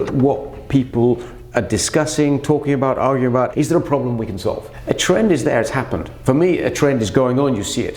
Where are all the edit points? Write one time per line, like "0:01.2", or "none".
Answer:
0:03.5
0:04.7
0:06.0